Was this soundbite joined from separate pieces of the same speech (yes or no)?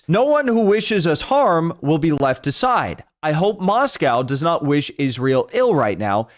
no